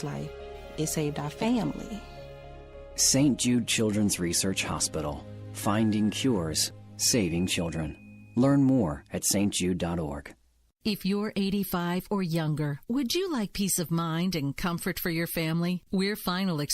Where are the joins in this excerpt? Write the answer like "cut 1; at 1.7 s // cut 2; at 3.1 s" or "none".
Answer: cut 1; at 10.3 s